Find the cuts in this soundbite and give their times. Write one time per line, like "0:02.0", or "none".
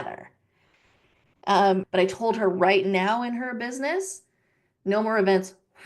0:01.9